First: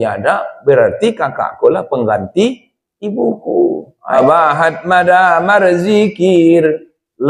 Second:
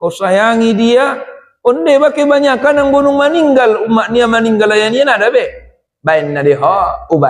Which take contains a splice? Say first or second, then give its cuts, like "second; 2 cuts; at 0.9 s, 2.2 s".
first; 1 cut; at 3.9 s